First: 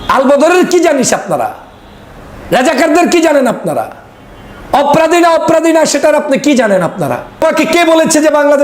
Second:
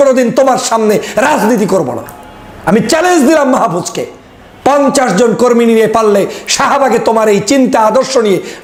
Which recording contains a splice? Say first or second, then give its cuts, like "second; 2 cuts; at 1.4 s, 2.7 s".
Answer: first; 1 cut; at 7.4 s